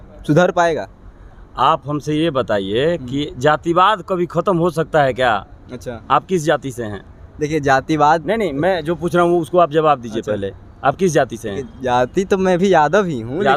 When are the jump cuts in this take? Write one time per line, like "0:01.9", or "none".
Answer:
none

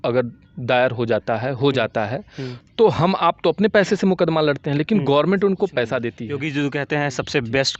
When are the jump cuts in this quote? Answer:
0:06.3

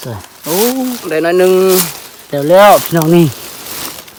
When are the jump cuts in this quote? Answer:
none

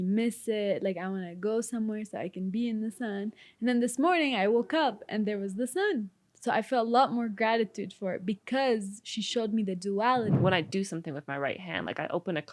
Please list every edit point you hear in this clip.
0:10.3

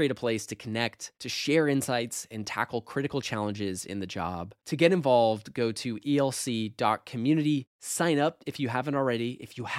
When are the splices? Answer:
none

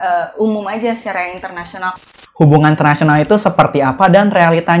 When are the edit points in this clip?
0:02.0

